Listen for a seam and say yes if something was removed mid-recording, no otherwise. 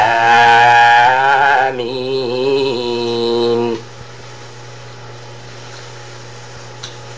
no